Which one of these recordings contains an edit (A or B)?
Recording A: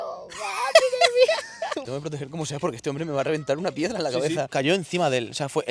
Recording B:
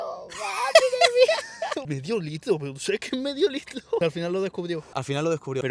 A